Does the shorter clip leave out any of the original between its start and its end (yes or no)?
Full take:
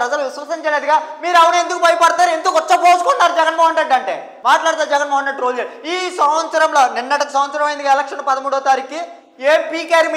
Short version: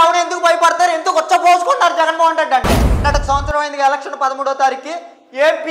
yes